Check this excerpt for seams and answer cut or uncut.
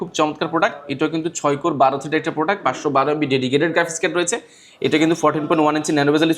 uncut